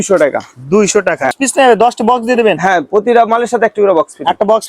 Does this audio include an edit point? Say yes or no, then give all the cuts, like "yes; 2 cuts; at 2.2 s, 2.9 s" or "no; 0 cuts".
yes; 1 cut; at 1.3 s